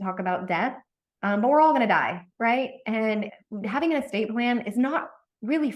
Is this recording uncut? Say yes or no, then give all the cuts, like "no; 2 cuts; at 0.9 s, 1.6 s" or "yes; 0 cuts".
no; 1 cut; at 3.4 s